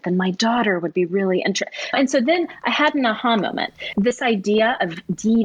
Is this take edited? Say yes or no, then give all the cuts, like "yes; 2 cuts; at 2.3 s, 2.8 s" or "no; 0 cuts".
yes; 2 cuts; at 1.9 s, 3.8 s